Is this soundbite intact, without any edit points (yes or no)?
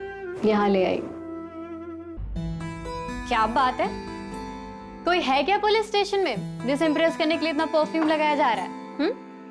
no